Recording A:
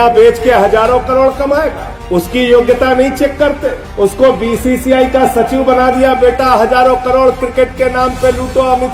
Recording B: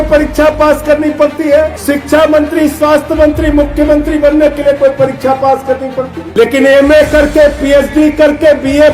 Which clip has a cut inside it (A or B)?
B